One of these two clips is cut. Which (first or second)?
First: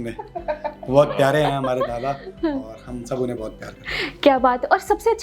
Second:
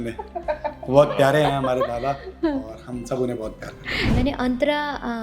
second